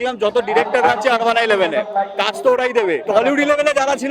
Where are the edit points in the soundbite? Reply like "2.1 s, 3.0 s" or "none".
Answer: 3.0 s